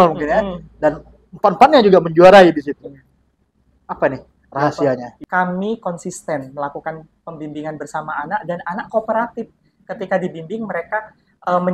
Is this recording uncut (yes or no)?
no